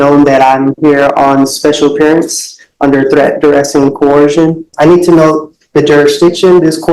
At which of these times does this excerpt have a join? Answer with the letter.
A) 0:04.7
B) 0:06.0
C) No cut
A